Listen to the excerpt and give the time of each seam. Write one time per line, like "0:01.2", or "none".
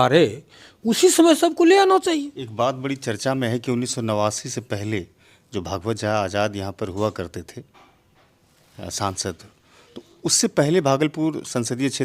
0:02.3